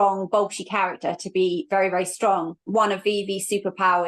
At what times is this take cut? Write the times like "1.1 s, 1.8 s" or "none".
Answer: 2.7 s